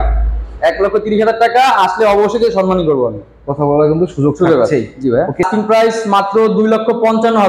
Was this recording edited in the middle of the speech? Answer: yes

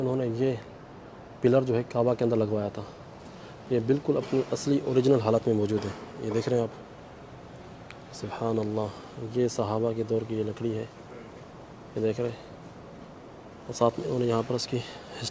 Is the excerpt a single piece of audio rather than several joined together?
yes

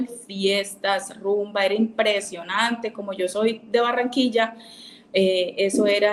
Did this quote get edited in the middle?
no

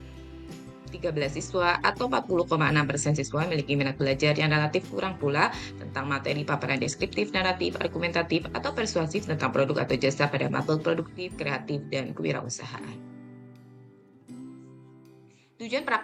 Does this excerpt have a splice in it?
no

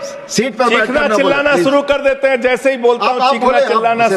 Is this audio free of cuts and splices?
yes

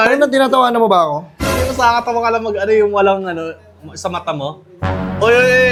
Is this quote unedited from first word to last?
yes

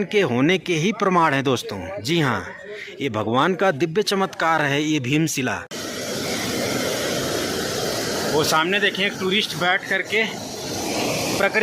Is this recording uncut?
no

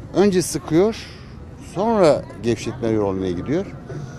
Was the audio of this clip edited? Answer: no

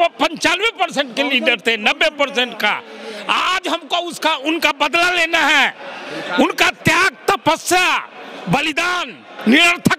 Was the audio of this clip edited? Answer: no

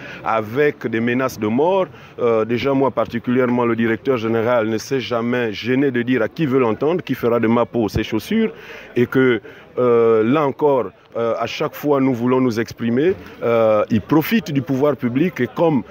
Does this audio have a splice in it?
no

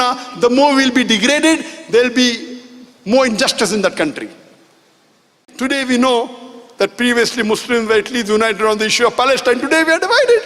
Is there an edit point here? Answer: yes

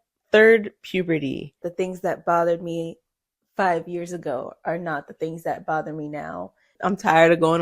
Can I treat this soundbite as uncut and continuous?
no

